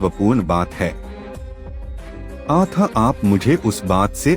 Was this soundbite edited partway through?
yes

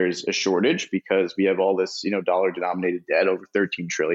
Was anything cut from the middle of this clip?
no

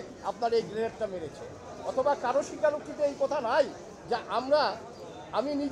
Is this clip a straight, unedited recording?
yes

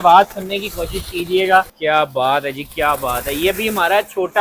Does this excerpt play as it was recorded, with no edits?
no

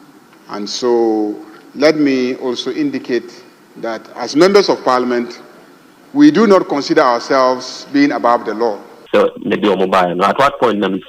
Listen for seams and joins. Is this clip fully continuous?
no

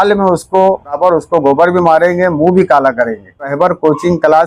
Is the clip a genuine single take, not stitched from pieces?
no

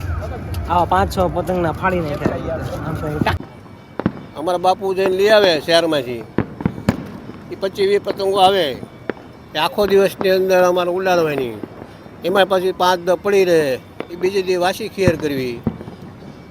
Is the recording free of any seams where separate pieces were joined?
no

